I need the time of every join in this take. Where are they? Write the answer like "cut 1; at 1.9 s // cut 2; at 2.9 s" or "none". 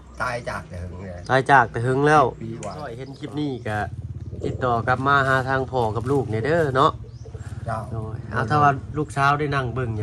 cut 1; at 3.1 s